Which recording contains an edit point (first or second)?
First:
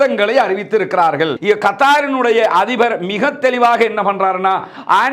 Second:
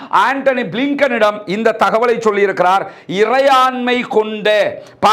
first